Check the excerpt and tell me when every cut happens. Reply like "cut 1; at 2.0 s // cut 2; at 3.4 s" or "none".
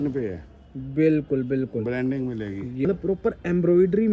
cut 1; at 2.8 s